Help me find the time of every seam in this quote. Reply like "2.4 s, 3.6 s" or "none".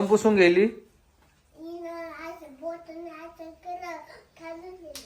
none